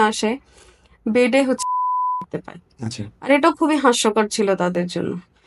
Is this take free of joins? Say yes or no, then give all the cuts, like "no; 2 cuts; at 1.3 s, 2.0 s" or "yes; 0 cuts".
yes; 0 cuts